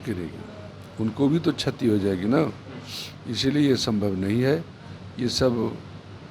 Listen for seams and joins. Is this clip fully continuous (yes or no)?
yes